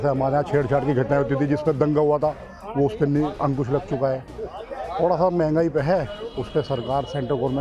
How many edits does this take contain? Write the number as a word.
zero